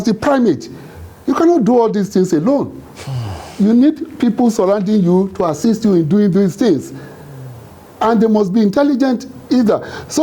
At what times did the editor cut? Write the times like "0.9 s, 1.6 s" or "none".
none

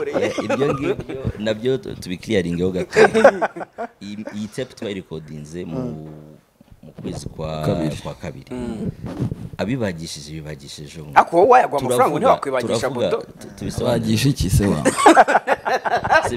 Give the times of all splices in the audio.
none

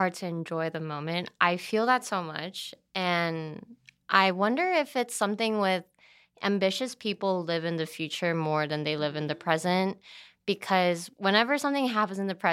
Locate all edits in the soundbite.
none

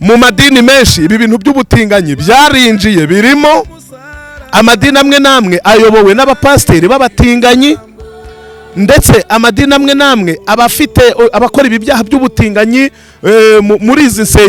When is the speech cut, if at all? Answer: none

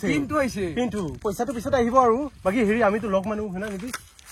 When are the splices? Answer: 1.2 s

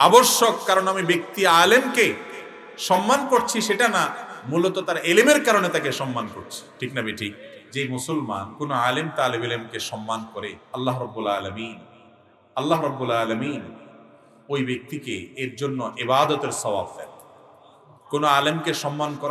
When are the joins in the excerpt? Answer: 7.5 s, 8.5 s, 10.6 s

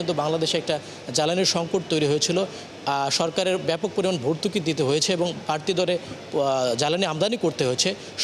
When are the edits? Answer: none

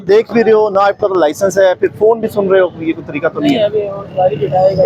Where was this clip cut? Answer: none

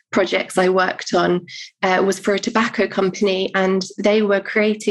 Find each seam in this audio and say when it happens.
none

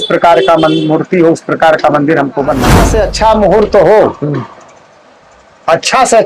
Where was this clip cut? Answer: 2.9 s

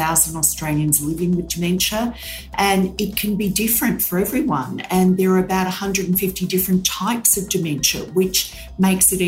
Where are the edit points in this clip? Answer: none

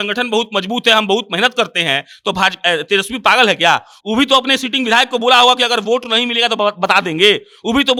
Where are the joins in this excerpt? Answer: none

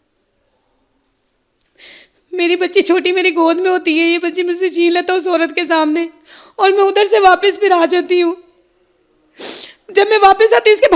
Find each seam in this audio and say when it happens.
none

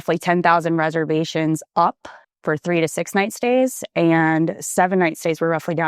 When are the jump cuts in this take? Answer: none

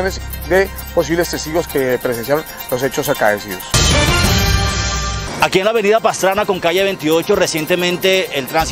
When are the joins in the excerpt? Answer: 3.7 s, 5.2 s

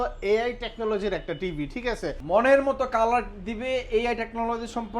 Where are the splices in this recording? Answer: 2.2 s

